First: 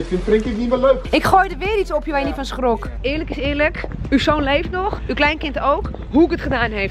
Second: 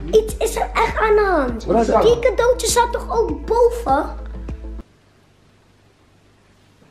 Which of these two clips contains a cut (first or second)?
first